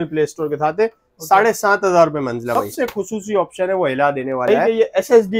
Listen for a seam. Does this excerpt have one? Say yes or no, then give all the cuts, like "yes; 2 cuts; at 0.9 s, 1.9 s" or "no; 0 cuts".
yes; 2 cuts; at 2.5 s, 4.5 s